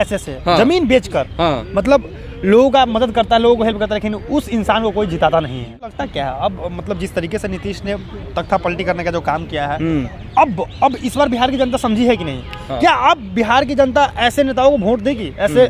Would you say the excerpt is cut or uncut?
cut